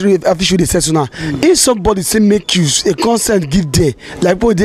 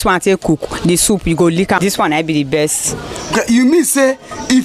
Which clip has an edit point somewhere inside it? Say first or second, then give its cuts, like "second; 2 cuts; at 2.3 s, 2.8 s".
second; 1 cut; at 1.8 s